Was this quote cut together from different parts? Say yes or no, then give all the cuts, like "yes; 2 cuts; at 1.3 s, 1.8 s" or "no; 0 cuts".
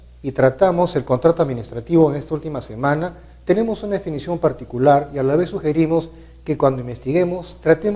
yes; 1 cut; at 1.6 s